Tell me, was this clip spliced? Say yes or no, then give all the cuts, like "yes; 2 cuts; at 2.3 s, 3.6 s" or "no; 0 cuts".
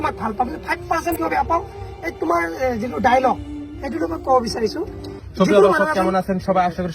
yes; 1 cut; at 1.1 s